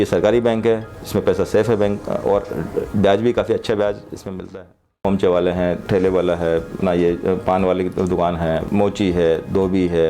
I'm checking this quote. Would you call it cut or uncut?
cut